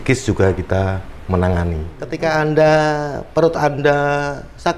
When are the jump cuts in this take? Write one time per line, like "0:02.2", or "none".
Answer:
0:02.1